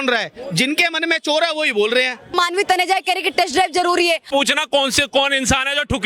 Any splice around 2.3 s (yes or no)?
yes